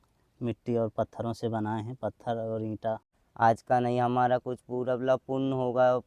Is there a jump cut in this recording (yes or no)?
yes